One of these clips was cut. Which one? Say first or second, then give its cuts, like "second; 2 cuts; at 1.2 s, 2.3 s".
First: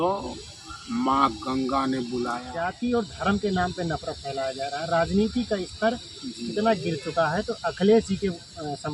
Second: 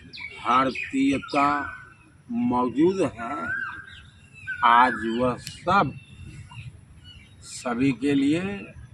first; 1 cut; at 2.7 s